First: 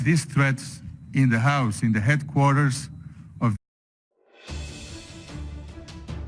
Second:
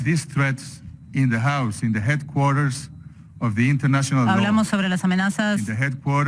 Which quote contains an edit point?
second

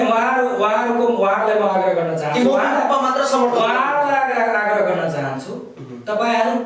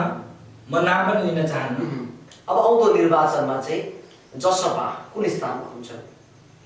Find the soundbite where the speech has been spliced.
second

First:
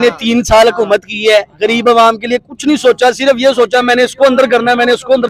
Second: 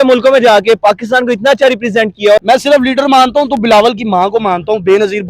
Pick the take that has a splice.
second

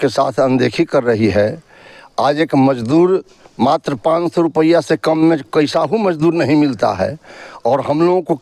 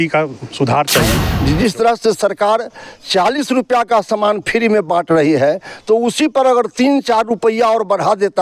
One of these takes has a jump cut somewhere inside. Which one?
second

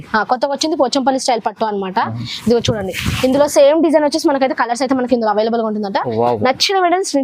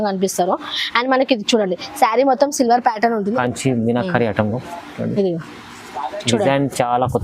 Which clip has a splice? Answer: second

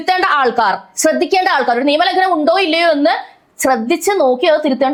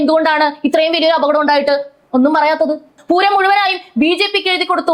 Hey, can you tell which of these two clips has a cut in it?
second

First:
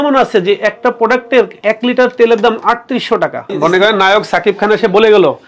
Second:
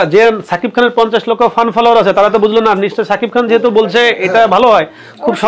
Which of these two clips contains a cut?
first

